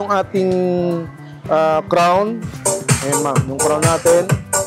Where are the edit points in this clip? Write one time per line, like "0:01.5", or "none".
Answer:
0:02.6